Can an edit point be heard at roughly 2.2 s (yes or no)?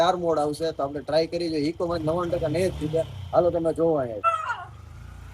no